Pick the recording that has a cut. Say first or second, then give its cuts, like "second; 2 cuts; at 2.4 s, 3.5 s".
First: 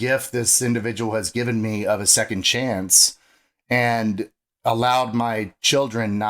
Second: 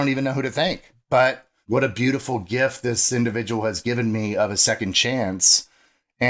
second; 2 cuts; at 0.9 s, 1.5 s